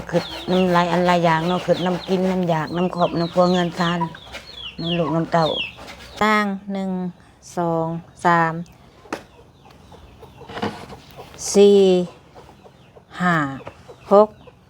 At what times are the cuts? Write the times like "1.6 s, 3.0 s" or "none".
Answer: 6.4 s